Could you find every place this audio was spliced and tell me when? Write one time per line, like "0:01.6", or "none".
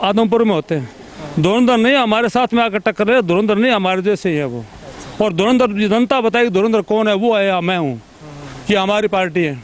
none